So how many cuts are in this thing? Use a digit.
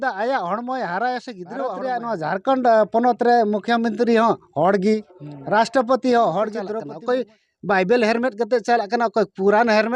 2